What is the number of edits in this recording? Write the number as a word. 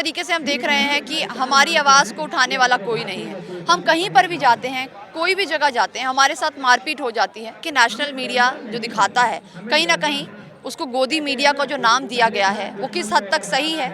one